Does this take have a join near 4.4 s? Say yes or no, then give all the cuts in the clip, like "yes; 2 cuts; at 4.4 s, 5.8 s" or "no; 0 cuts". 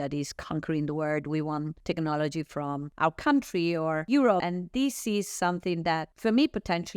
yes; 4 cuts; at 1.7 s, 2.9 s, 4.4 s, 6.1 s